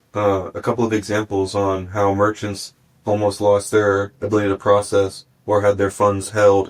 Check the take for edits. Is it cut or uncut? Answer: uncut